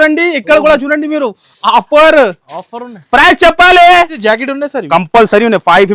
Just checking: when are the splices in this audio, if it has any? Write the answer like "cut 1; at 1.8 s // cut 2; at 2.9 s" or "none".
cut 1; at 4.1 s